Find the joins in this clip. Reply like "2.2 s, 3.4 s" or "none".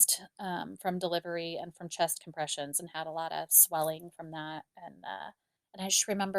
5.2 s